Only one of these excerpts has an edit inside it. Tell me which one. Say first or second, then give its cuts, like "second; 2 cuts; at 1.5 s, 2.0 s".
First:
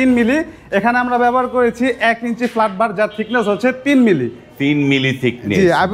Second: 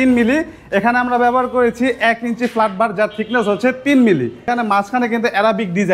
second; 1 cut; at 4.4 s